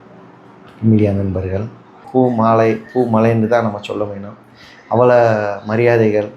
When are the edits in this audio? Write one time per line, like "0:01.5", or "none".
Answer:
0:02.0